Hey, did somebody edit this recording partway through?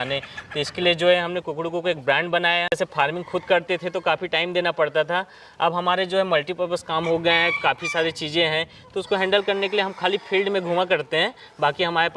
yes; 1 cut; at 2.7 s

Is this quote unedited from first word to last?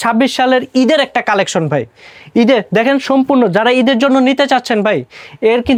yes; 0 cuts

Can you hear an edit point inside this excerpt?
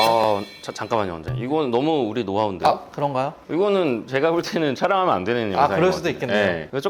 no; 0 cuts

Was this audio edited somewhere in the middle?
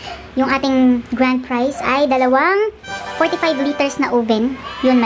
no; 0 cuts

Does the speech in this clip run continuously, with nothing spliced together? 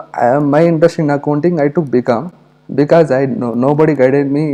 yes; 0 cuts

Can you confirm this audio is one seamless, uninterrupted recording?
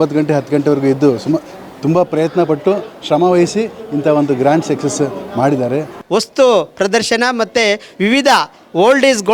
no; 1 cut; at 6.0 s

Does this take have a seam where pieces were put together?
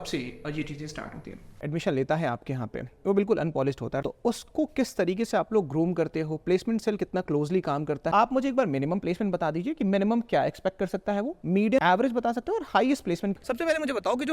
yes; 5 cuts; at 1.6 s, 4.0 s, 8.1 s, 11.8 s, 13.3 s

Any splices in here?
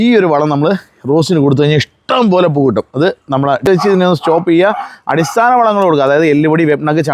yes; 1 cut; at 3.7 s

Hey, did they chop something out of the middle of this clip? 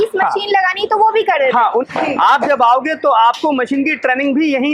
yes; 1 cut; at 1.9 s

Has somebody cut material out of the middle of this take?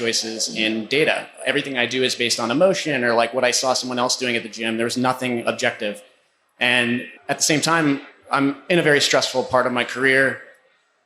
yes; 1 cut; at 7.1 s

